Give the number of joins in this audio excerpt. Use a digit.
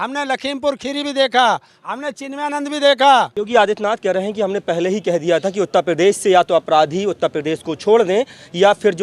1